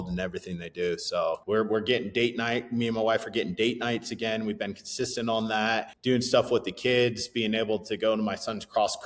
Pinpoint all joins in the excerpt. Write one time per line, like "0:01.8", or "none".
0:01.4
0:05.9